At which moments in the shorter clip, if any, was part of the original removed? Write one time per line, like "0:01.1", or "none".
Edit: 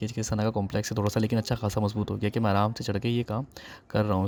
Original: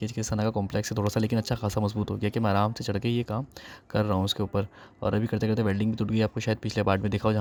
none